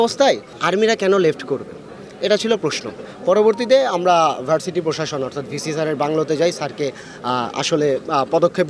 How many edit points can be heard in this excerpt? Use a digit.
0